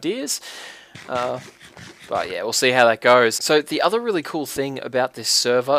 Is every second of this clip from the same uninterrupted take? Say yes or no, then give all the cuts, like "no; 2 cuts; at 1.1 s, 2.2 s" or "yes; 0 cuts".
no; 1 cut; at 4.0 s